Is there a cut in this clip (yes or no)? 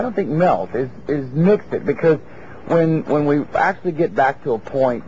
no